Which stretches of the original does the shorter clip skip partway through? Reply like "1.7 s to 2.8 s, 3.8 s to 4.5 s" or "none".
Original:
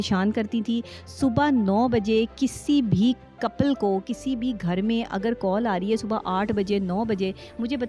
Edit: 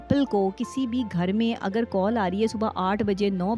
none